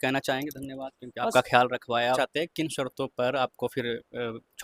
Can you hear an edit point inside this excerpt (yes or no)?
yes